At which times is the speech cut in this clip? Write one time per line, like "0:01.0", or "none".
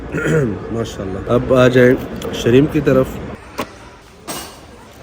0:01.2
0:03.3